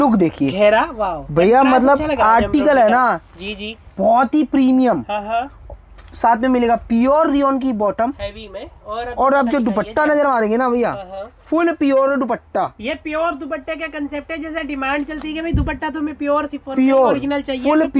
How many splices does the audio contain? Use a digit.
0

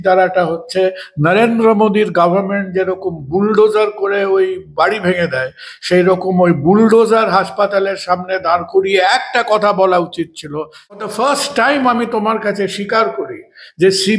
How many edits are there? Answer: 1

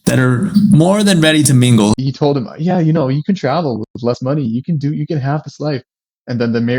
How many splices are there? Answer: 1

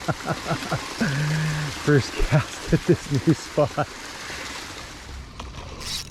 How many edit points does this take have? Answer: 1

